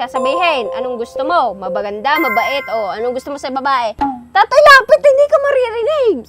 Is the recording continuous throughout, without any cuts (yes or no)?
no